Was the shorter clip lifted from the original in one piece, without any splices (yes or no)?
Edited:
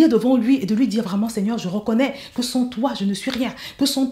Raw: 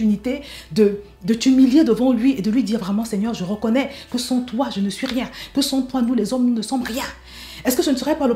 yes